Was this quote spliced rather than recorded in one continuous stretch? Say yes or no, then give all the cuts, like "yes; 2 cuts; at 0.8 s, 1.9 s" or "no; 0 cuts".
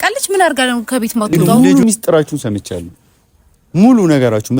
yes; 1 cut; at 1.4 s